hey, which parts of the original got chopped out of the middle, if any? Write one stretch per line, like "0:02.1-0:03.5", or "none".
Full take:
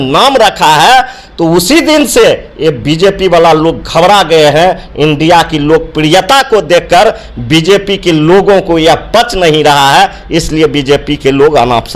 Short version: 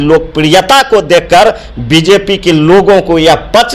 none